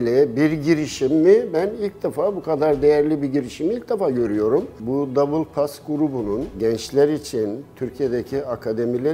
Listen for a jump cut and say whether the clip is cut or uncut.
cut